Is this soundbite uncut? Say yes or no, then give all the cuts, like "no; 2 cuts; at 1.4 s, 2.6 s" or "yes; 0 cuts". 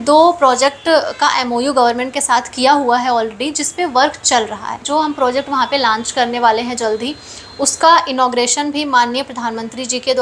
no; 1 cut; at 4.8 s